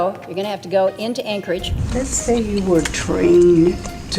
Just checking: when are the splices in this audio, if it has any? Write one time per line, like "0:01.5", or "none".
0:01.8